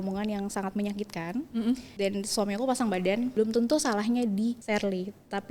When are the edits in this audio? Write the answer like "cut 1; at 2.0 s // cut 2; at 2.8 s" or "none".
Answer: cut 1; at 1.9 s // cut 2; at 3.3 s // cut 3; at 4.6 s